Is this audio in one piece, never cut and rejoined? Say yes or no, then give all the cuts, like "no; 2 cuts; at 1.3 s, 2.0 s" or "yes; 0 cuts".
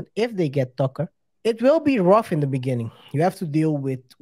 no; 1 cut; at 1.2 s